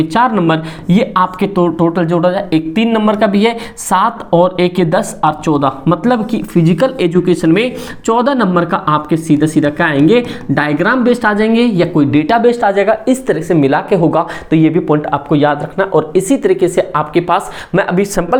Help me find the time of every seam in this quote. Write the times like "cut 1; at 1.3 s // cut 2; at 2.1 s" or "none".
none